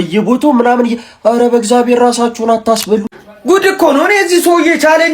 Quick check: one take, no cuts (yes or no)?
no